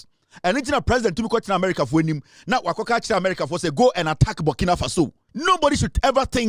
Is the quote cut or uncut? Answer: cut